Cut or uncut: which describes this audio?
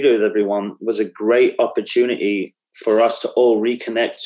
uncut